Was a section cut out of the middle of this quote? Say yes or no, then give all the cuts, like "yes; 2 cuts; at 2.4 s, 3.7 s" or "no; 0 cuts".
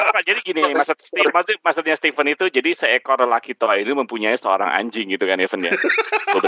no; 0 cuts